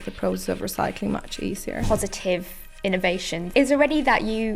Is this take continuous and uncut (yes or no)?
no